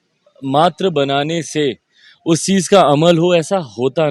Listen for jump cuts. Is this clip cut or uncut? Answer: uncut